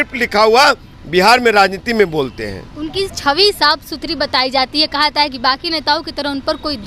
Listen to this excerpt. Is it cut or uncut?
uncut